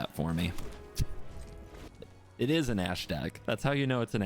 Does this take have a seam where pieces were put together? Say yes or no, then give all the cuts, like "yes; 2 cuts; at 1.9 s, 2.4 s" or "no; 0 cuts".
yes; 1 cut; at 1.9 s